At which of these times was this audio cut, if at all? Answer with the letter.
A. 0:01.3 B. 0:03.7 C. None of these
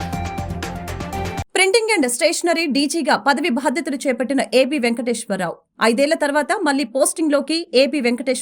A